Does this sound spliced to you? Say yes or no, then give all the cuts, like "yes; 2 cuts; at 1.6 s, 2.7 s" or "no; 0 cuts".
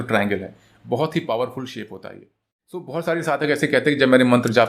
yes; 1 cut; at 2.9 s